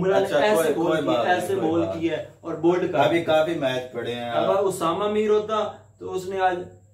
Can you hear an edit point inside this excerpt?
no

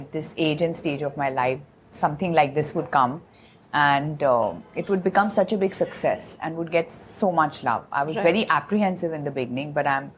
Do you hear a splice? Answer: no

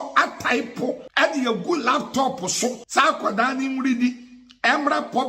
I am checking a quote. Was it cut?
yes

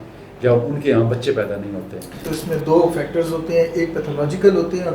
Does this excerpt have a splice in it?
yes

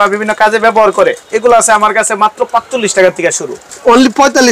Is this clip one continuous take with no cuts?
yes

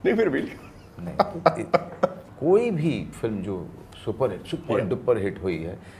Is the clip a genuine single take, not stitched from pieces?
no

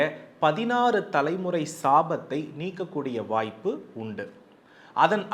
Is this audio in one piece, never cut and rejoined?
yes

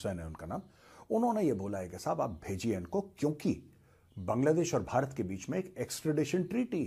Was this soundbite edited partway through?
no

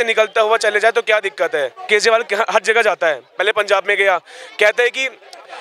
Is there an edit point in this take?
yes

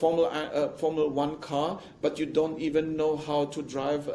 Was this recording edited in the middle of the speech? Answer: no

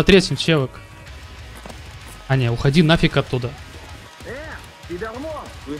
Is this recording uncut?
yes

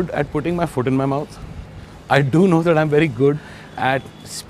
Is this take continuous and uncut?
yes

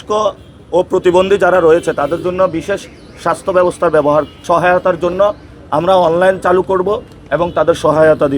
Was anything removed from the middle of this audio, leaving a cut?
yes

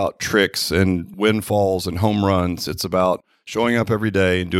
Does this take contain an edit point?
yes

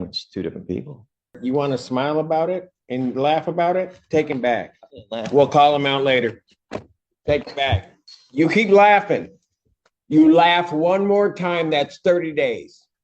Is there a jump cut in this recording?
yes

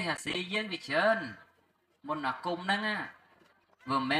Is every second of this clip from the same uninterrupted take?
yes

